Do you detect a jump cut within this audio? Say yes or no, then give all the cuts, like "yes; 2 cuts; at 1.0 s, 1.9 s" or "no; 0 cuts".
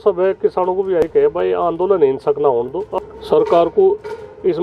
yes; 1 cut; at 3.0 s